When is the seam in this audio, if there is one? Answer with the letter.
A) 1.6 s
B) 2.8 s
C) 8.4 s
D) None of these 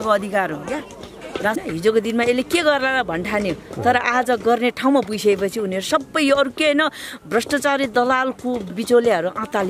A